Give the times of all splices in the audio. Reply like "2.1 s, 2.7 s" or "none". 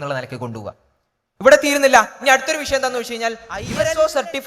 3.5 s